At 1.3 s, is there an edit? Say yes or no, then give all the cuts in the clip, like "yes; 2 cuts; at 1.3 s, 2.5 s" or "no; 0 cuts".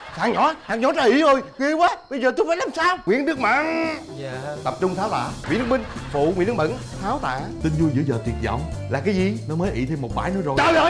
no; 3 cuts; at 3.0 s, 5.4 s, 7.5 s